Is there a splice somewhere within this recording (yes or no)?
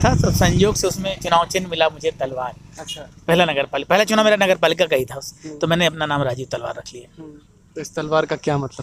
no